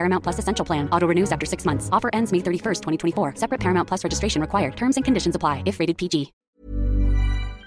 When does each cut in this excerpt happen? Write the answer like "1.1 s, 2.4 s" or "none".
6.5 s